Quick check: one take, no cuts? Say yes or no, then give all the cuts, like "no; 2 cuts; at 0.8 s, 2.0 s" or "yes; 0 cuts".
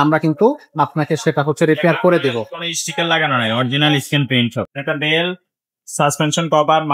no; 1 cut; at 4.8 s